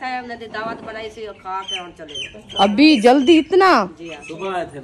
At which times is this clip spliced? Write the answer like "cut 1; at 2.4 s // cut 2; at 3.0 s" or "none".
none